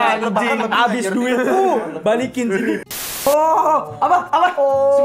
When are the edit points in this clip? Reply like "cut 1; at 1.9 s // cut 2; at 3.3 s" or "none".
cut 1; at 2.8 s